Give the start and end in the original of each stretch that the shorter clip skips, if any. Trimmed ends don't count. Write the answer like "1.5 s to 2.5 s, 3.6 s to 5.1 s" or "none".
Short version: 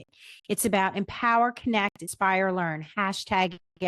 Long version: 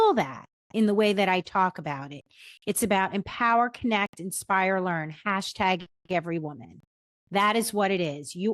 4.2 s to 4.3 s